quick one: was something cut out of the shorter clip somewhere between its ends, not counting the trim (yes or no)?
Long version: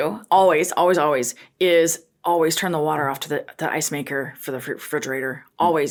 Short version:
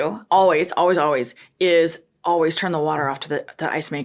no